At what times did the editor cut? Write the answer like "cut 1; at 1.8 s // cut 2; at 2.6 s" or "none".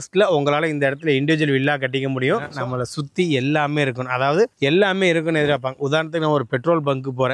cut 1; at 2.5 s